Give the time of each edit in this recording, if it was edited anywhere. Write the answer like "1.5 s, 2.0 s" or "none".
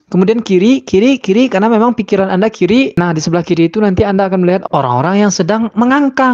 none